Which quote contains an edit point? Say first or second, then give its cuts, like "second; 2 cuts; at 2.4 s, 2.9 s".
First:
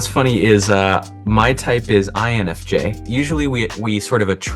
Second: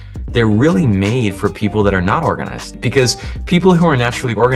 first; 1 cut; at 3.0 s